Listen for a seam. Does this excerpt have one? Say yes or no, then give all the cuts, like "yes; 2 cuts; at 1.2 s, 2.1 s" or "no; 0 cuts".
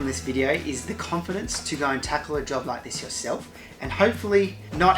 no; 0 cuts